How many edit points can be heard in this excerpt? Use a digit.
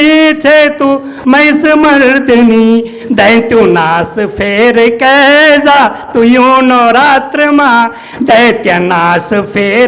0